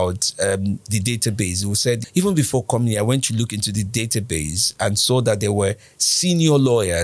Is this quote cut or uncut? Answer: cut